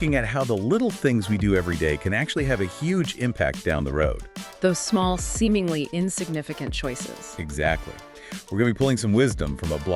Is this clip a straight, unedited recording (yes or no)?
yes